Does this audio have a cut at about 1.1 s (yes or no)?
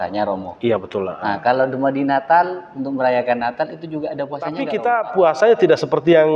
no